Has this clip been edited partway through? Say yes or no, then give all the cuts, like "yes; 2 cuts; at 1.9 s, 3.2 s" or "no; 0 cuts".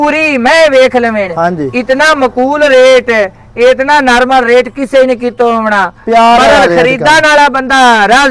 no; 0 cuts